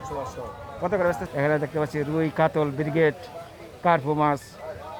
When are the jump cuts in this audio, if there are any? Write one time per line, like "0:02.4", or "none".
0:01.2